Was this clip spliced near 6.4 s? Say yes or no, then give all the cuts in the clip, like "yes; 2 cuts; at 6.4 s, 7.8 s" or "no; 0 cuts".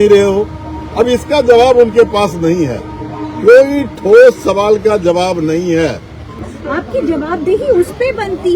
yes; 1 cut; at 6.4 s